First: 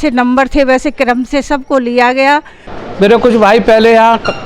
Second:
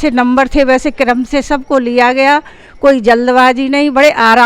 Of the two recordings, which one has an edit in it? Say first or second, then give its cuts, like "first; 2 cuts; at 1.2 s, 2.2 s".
first; 1 cut; at 2.6 s